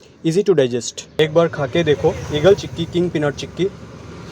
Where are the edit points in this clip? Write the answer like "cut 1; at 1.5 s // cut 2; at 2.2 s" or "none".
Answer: cut 1; at 1.2 s